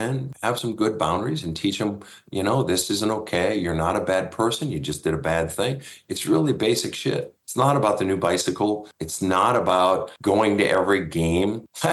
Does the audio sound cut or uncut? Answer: uncut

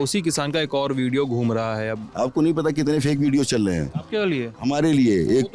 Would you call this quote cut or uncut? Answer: cut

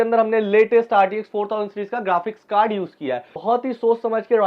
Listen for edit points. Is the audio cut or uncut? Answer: cut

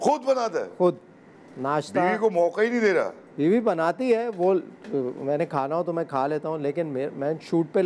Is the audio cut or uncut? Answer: uncut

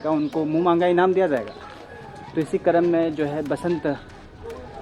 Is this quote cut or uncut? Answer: uncut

